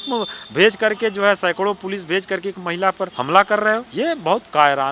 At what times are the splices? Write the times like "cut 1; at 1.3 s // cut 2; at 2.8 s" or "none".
cut 1; at 3.1 s // cut 2; at 3.9 s